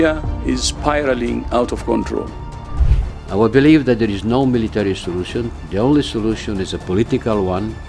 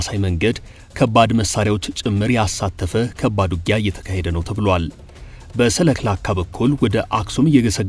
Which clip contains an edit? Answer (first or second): second